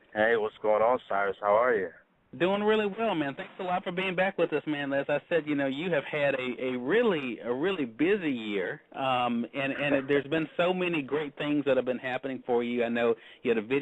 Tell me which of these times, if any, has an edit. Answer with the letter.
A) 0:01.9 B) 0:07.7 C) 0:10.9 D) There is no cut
C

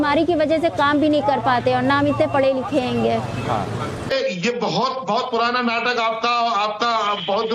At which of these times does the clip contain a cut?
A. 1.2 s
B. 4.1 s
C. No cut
B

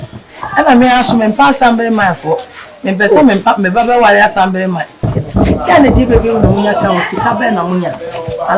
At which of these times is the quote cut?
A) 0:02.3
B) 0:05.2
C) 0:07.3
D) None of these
B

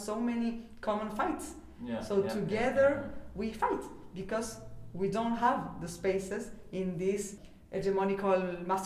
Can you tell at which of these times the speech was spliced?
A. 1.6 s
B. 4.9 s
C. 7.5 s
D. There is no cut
C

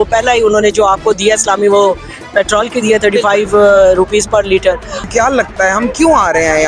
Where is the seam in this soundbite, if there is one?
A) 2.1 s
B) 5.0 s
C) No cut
B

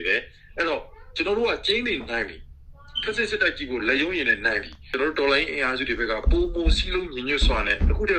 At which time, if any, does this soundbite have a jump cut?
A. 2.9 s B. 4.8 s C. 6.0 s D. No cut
D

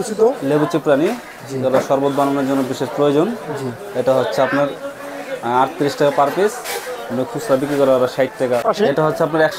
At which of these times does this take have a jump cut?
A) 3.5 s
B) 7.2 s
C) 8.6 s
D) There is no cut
C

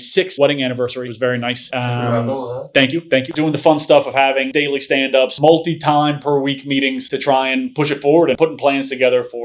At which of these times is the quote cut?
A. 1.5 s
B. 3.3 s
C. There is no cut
B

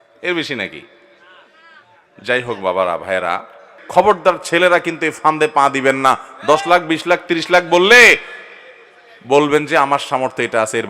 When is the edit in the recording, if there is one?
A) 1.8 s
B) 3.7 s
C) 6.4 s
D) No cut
B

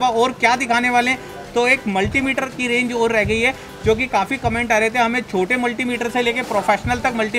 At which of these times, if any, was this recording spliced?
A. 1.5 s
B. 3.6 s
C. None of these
C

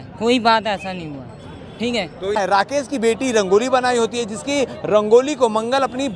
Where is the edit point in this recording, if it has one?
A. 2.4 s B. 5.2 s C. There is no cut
A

